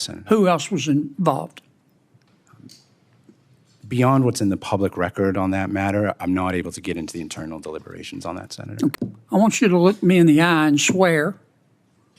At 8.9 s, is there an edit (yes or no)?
yes